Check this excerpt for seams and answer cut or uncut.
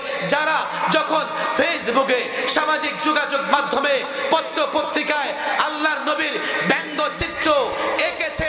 uncut